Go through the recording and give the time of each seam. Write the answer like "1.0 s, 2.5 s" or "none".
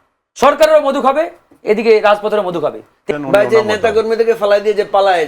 2.9 s

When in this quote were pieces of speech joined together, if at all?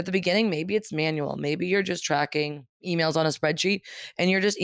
2.7 s

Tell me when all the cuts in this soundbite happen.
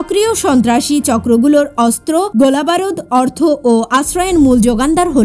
2.3 s

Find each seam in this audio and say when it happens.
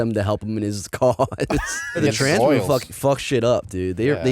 2.0 s

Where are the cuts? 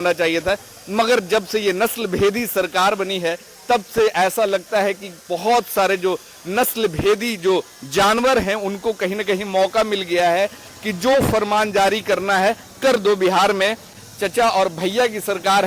13.9 s

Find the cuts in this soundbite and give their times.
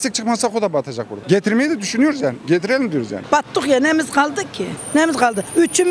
3.1 s

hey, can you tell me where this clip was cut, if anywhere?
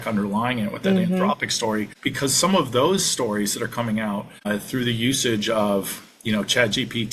2.0 s, 4.3 s

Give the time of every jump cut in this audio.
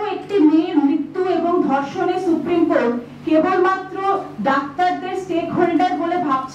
none

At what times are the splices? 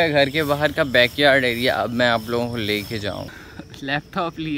3.3 s

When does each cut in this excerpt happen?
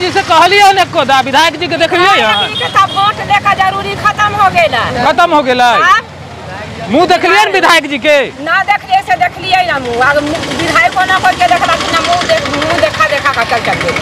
none

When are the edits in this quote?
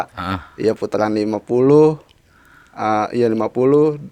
none

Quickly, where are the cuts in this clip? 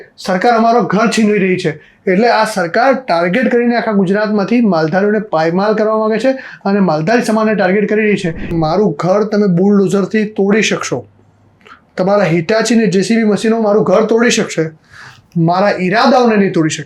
8.5 s

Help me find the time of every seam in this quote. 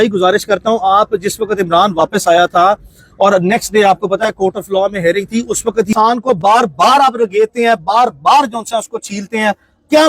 5.9 s

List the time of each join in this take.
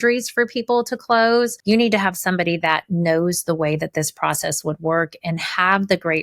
1.6 s

